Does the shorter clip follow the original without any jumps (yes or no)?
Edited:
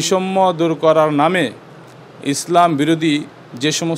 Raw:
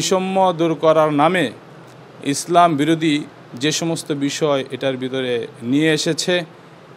yes